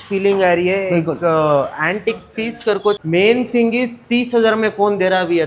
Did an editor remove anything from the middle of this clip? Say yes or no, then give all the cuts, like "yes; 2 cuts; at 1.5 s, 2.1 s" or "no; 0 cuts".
yes; 1 cut; at 3.0 s